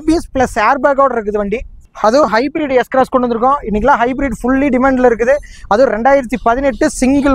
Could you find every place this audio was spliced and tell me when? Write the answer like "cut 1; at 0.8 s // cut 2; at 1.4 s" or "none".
cut 1; at 1.7 s